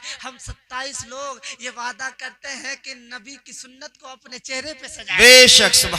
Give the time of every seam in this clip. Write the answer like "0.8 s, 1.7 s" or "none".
none

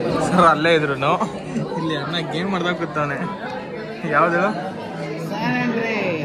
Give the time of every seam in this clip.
none

